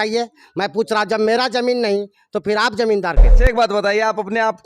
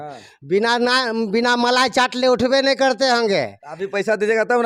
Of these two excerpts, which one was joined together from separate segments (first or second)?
first